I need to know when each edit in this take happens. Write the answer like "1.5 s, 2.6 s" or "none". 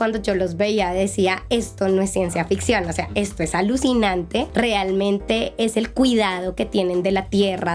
4.5 s